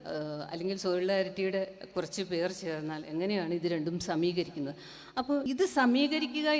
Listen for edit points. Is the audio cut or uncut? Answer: cut